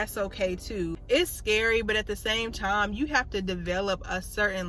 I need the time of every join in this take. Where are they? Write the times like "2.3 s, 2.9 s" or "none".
1.0 s